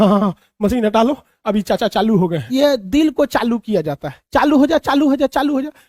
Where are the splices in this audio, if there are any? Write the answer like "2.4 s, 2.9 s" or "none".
2.4 s

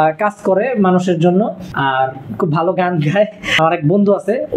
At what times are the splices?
1.6 s, 3.4 s

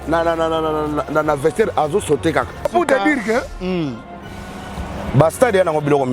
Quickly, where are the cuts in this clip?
2.7 s

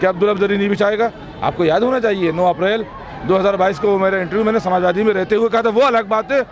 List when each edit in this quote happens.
none

